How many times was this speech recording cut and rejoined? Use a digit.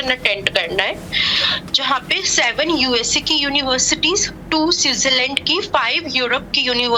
0